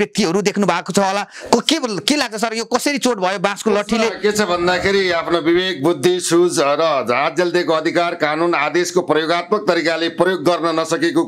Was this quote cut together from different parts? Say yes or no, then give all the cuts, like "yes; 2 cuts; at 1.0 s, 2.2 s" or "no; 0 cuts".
no; 0 cuts